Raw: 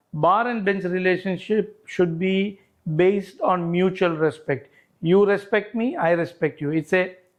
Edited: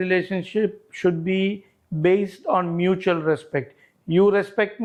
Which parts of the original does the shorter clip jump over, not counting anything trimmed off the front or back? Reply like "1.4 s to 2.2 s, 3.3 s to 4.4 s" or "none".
none

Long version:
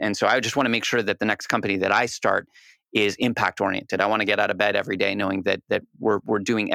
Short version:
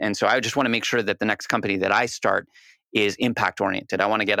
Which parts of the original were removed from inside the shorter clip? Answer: none

